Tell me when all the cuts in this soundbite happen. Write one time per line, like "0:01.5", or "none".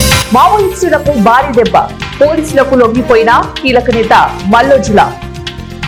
none